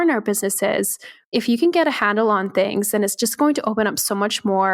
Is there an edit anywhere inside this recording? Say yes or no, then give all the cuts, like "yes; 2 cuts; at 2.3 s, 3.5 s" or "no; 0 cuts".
yes; 1 cut; at 1.1 s